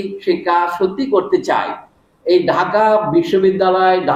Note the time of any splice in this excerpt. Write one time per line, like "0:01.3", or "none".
none